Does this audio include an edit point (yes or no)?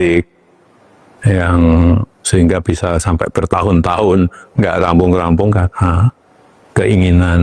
no